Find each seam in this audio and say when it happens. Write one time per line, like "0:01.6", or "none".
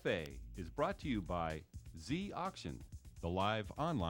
none